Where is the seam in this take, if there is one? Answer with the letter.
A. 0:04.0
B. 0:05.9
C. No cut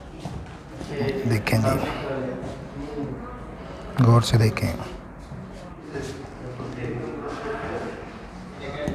B